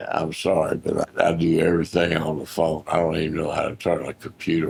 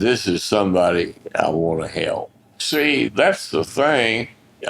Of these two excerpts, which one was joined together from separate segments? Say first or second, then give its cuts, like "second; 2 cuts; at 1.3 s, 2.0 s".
second; 1 cut; at 2.7 s